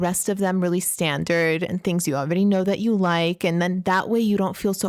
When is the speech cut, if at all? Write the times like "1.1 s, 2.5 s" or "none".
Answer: none